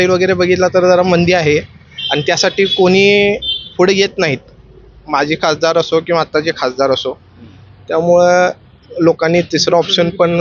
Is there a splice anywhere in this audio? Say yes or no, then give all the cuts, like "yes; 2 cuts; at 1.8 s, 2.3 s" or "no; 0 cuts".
no; 0 cuts